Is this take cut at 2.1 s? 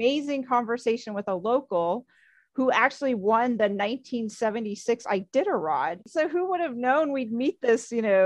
no; 1 cut; at 6.1 s

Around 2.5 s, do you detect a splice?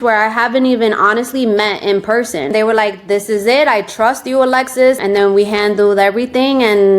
yes; 1 cut; at 2.5 s

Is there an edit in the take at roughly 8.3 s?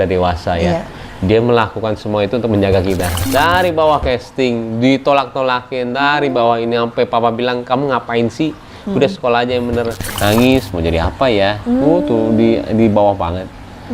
no; 2 cuts; at 3.2 s, 10.0 s

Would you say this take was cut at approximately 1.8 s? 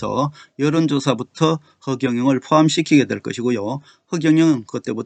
no; 0 cuts

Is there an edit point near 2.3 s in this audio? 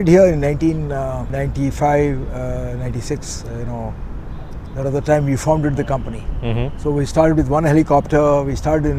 no; 0 cuts

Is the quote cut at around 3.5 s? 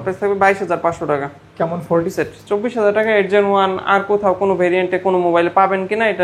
no; 1 cut; at 2.1 s

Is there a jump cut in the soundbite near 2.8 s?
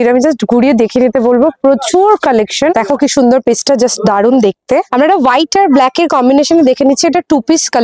yes; 2 cuts; at 2.8 s, 4.9 s

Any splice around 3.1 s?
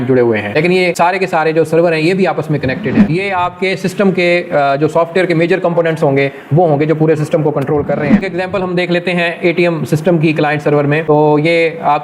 yes; 2 cuts; at 3.1 s, 8.3 s

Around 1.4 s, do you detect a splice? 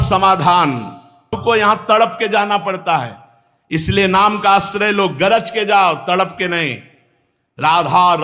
yes; 1 cut; at 1.4 s

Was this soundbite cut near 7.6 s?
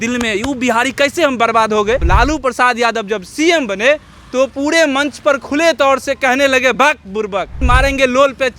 yes; 2 cuts; at 2.0 s, 7.6 s

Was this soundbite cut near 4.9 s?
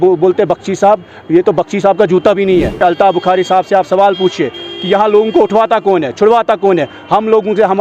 no; 1 cut; at 2.8 s

